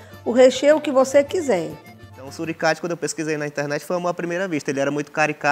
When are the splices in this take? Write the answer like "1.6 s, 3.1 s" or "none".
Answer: 2.2 s